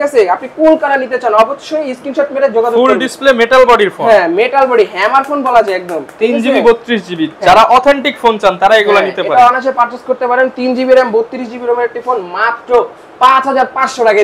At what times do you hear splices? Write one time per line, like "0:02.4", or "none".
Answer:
none